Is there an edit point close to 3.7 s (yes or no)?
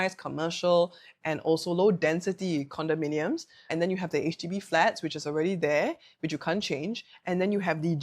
yes